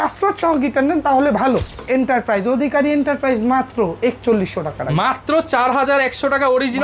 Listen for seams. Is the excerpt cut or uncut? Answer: cut